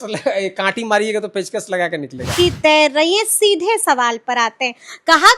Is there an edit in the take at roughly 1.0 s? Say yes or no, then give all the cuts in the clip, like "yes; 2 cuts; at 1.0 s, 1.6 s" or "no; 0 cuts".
no; 1 cut; at 2.4 s